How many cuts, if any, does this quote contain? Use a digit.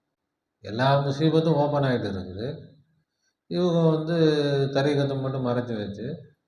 0